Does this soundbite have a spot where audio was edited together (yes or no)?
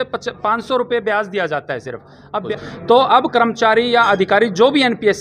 yes